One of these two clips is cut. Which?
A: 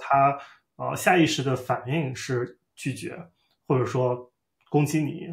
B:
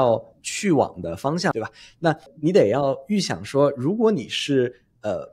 B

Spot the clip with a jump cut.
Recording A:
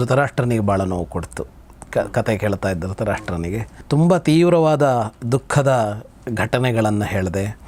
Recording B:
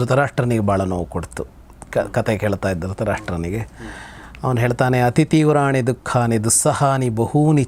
A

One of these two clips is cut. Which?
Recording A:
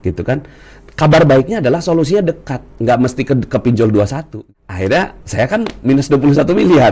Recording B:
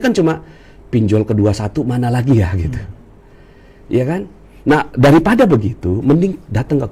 A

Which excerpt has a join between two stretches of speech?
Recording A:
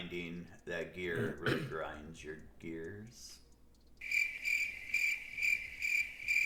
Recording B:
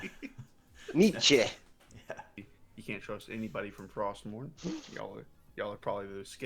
B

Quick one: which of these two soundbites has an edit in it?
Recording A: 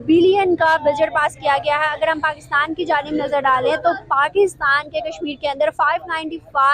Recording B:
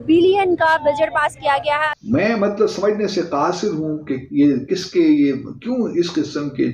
B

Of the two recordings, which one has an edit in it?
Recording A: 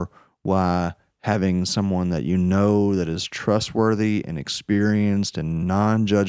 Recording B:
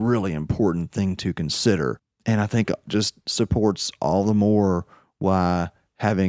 B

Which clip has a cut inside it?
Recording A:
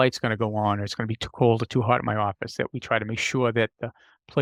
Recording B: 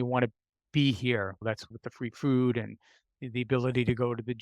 B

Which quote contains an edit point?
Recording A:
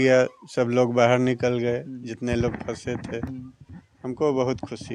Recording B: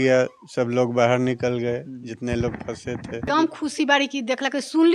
B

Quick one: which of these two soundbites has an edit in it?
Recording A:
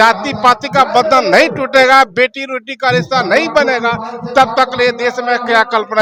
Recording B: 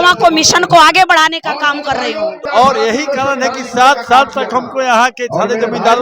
B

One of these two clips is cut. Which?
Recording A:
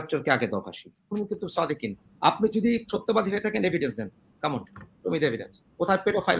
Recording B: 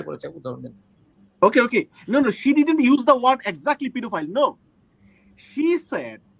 A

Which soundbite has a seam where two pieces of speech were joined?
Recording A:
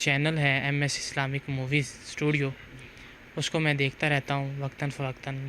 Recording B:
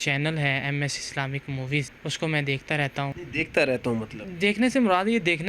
B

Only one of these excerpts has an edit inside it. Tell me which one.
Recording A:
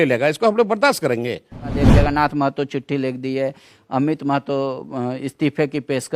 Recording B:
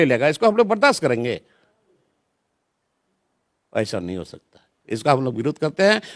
A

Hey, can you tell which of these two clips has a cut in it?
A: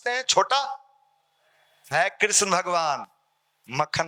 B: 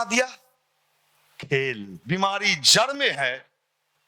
B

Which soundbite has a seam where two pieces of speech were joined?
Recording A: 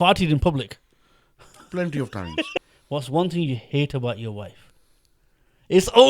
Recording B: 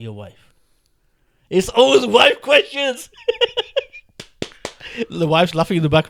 A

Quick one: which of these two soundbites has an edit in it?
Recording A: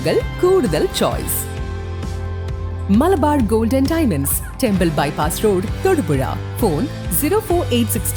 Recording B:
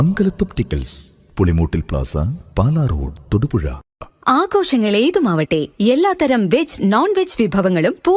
B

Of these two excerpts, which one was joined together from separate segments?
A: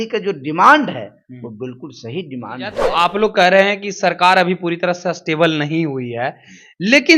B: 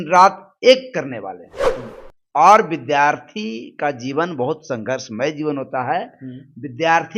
A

